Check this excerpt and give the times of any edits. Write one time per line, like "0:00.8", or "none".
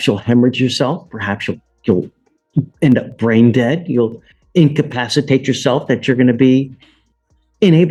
none